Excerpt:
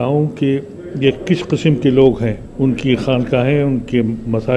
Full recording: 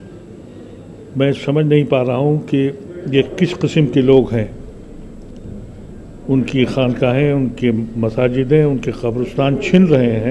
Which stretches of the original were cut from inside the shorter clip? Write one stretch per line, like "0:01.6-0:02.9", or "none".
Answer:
0:04.6-0:06.1